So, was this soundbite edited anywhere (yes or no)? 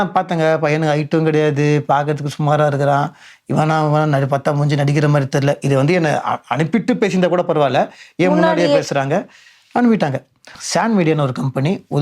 yes